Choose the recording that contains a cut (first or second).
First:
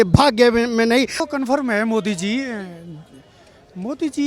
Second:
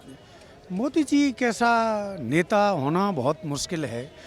first